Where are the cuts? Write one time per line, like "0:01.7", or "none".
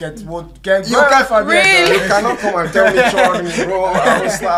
none